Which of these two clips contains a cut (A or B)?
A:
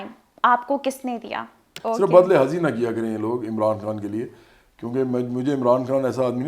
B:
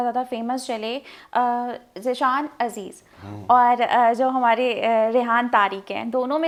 A